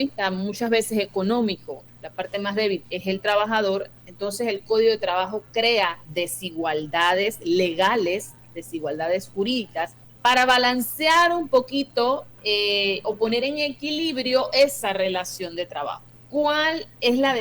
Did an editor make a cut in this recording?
yes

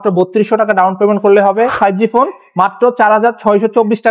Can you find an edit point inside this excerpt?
yes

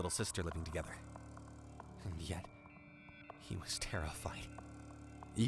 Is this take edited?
no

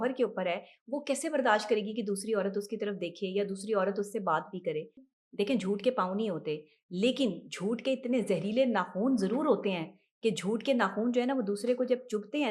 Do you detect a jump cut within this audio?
yes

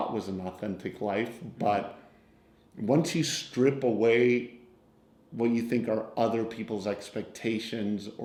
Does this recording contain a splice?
no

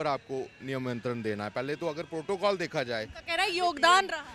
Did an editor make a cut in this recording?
no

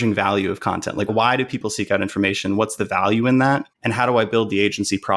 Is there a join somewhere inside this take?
yes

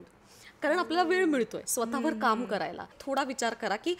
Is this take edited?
yes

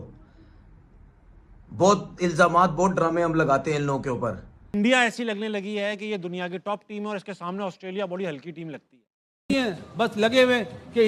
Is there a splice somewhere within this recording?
yes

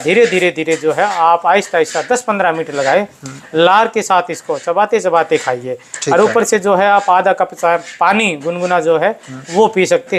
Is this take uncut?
yes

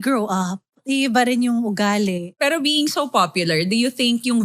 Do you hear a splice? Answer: yes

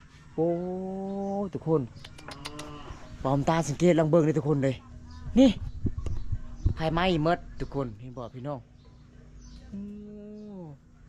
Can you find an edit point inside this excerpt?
no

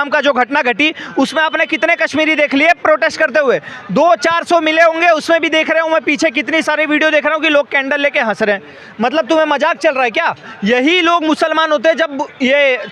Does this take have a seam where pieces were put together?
no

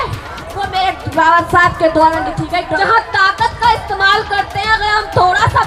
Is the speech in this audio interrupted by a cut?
yes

